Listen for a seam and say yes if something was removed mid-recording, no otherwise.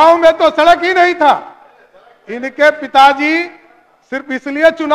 no